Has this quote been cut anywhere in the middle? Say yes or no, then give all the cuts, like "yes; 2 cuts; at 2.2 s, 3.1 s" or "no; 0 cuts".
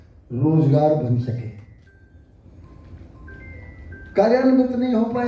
no; 0 cuts